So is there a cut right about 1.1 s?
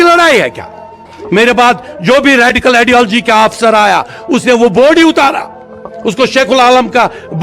yes; 1 cut; at 1.1 s

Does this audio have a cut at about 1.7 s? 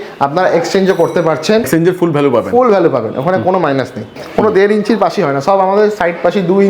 yes; 2 cuts; at 1.7 s, 4.0 s

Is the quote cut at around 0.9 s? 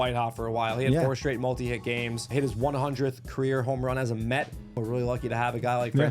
no; 2 cuts; at 2.3 s, 4.8 s

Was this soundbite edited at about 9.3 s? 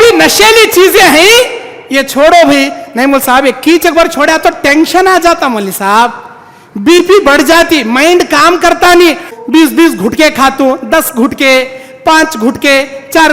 yes; 1 cut; at 9.3 s

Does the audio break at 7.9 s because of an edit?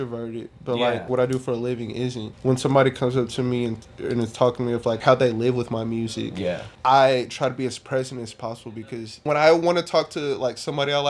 no; 5 cuts; at 1.1 s, 2.3 s, 5.0 s, 6.7 s, 9.2 s

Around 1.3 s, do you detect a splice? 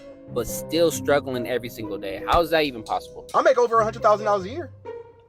no; 1 cut; at 3.2 s

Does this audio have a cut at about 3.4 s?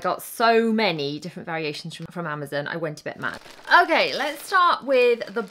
yes; 2 cuts; at 2.1 s, 3.4 s

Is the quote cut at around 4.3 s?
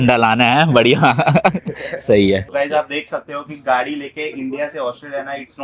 no; 1 cut; at 2.5 s

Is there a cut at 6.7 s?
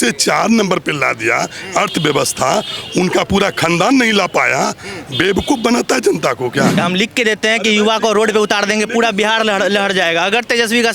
yes; 1 cut; at 6.7 s

